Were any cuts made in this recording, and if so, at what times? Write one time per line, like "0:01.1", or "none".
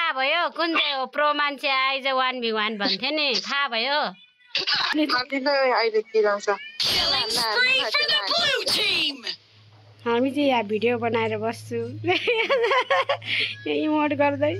0:04.9